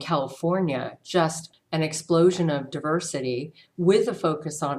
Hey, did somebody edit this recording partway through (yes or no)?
yes